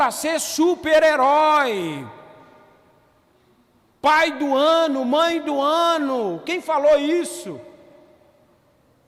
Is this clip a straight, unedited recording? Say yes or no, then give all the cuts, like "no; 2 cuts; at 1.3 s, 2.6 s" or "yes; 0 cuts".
yes; 0 cuts